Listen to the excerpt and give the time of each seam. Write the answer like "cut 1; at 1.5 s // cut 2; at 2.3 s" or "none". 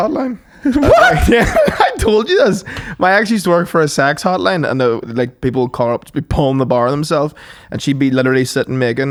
none